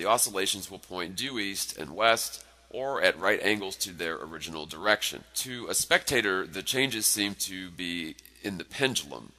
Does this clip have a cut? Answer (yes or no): yes